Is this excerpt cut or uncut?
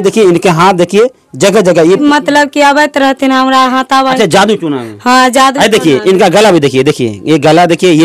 cut